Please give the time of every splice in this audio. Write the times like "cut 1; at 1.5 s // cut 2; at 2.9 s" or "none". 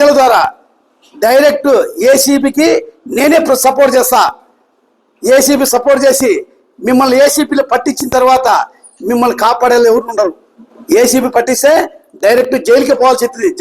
cut 1; at 10.7 s

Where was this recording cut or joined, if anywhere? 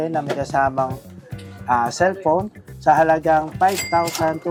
none

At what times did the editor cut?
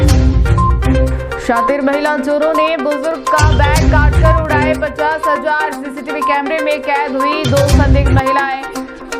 cut 1; at 0.9 s

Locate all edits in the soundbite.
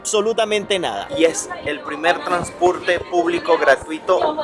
cut 1; at 1.0 s

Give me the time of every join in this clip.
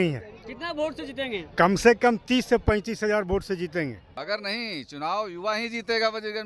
cut 1; at 4.1 s

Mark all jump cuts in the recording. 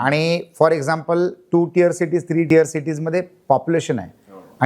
cut 1; at 2.5 s

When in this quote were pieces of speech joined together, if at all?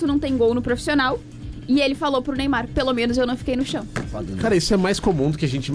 cut 1; at 4.2 s

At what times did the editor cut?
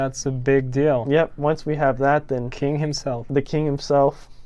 none

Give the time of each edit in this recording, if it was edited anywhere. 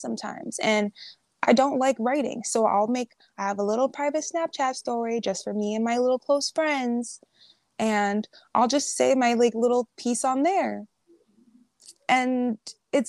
none

